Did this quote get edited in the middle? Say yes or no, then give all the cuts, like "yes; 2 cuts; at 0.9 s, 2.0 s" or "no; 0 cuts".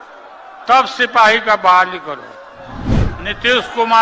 yes; 1 cut; at 2.9 s